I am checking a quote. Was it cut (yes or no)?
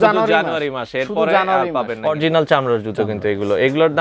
yes